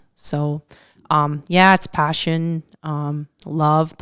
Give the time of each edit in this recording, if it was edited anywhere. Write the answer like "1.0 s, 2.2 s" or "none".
none